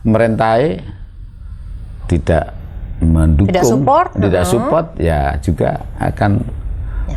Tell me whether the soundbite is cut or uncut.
uncut